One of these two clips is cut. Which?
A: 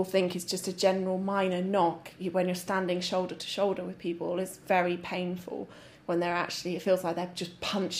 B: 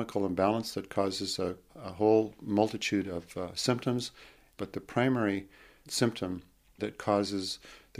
B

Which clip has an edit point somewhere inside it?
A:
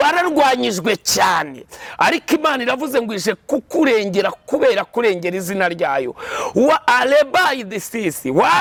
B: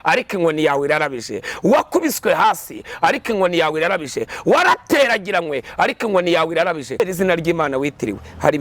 B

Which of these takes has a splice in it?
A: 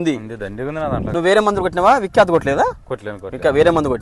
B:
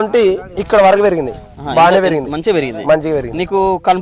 A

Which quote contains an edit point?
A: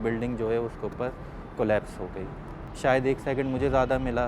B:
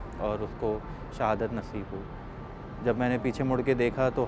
A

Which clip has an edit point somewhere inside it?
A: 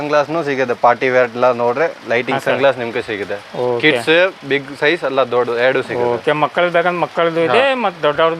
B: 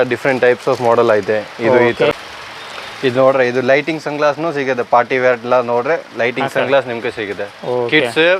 B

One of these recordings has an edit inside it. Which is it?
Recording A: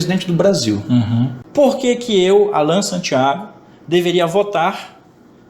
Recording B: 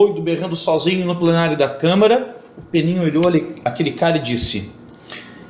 A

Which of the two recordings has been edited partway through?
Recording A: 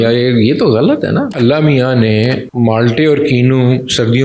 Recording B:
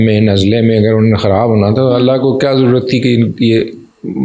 A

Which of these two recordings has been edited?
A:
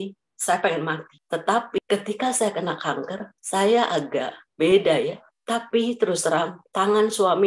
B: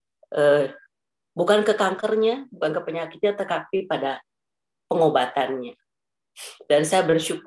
A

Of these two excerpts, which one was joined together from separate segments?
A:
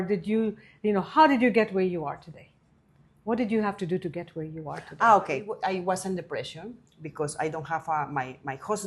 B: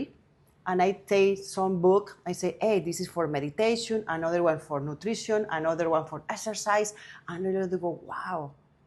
A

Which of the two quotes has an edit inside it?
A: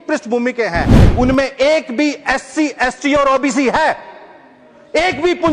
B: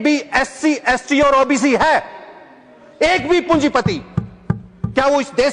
A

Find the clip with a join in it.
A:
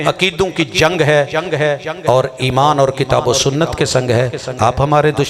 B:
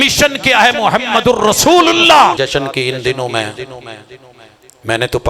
B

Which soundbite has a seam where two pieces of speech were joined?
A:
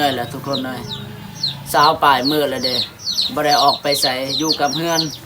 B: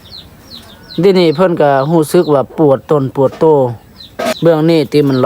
B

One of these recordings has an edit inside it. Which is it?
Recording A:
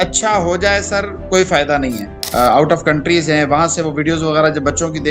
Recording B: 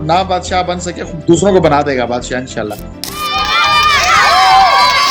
A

